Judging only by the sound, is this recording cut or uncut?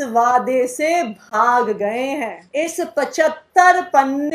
cut